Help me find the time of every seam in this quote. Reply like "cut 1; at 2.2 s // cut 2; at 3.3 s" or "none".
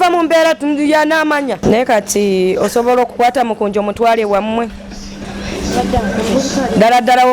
cut 1; at 1.6 s